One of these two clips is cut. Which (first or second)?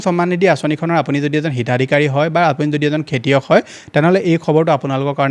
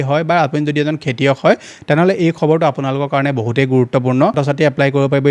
second